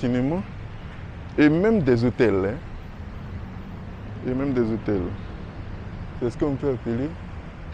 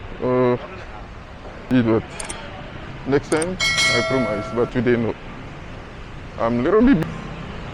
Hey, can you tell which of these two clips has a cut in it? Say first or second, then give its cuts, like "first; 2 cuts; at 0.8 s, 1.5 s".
second; 2 cuts; at 1.6 s, 7.0 s